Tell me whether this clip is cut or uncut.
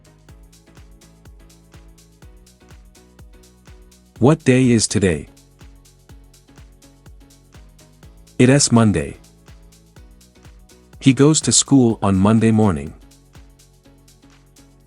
cut